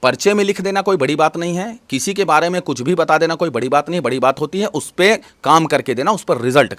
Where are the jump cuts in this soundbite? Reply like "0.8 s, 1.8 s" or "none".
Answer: none